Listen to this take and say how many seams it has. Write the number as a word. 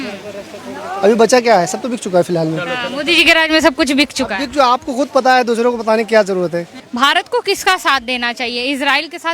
one